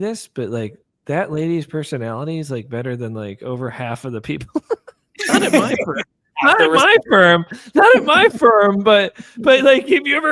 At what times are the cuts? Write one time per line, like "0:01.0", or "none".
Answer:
none